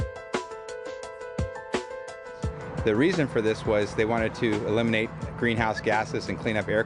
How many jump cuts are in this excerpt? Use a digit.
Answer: 1